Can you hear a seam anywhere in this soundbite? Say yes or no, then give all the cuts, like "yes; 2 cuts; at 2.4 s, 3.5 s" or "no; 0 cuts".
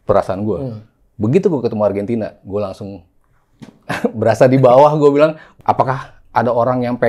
yes; 1 cut; at 5.4 s